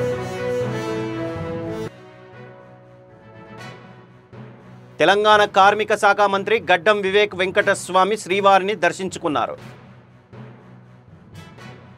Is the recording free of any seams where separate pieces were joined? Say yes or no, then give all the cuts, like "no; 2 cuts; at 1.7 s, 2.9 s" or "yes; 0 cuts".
no; 1 cut; at 1.8 s